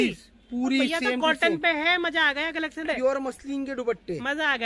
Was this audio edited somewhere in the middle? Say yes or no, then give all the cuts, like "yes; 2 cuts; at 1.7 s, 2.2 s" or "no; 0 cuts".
yes; 1 cut; at 2.9 s